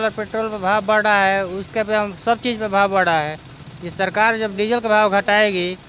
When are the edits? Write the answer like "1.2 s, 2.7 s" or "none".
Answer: none

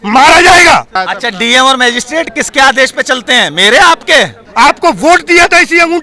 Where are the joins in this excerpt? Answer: 1.0 s, 4.4 s

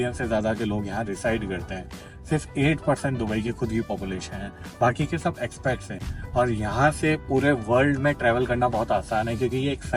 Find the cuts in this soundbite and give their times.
none

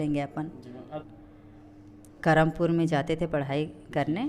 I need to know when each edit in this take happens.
1.0 s

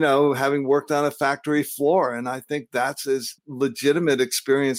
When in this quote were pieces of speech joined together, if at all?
3.4 s

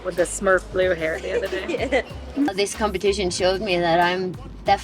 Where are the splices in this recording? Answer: 2.5 s

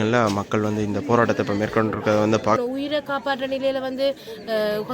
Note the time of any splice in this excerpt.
2.6 s

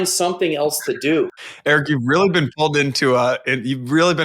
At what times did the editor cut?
1.7 s

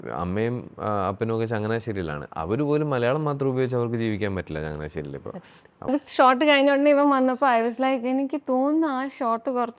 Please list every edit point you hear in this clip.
5.9 s

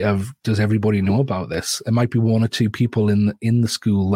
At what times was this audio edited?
none

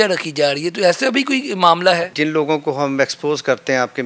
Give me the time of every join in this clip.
2.1 s

